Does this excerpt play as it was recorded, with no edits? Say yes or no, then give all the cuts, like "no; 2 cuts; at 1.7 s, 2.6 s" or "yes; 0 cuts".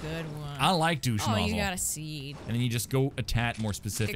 no; 1 cut; at 2.4 s